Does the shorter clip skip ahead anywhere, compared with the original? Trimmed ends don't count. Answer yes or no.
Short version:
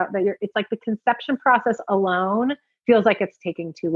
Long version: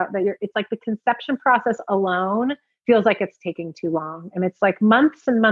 no